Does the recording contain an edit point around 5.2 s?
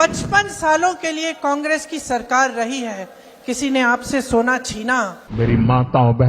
yes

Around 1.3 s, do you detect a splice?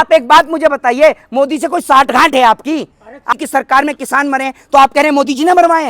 no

